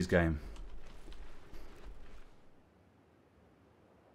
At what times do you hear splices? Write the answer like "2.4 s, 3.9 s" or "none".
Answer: 1.5 s

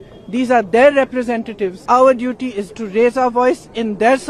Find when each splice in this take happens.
1.8 s

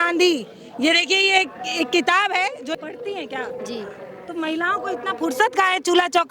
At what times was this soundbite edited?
2.6 s

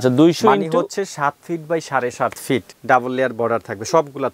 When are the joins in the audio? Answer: 2.7 s

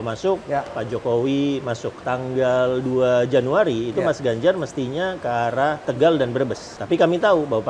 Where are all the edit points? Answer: 2.0 s, 5.9 s, 6.7 s

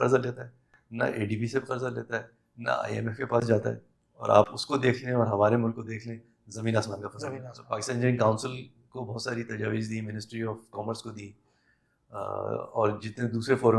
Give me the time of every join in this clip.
7.6 s

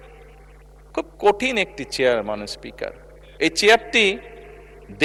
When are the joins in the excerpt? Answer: none

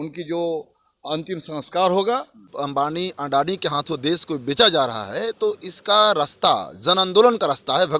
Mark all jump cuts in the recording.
2.4 s

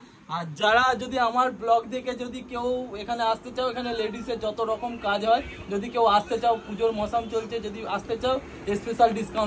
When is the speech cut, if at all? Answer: none

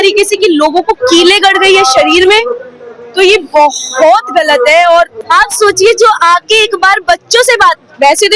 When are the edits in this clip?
5.2 s

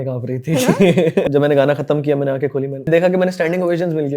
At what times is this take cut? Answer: 1.2 s, 2.9 s

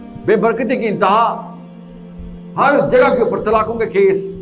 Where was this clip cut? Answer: none

